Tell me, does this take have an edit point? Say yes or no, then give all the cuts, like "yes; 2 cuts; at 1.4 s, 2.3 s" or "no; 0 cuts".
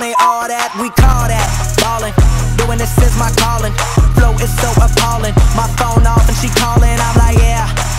no; 0 cuts